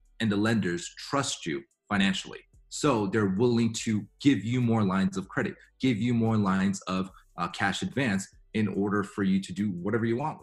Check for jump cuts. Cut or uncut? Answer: uncut